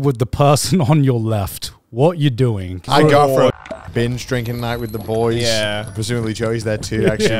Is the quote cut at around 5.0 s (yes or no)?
no